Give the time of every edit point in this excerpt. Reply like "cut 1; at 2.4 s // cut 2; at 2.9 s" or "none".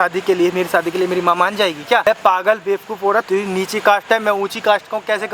cut 1; at 2.0 s // cut 2; at 3.3 s